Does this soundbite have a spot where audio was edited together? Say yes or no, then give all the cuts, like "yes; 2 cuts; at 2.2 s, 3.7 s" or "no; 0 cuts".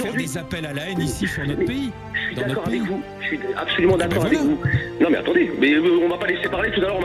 no; 0 cuts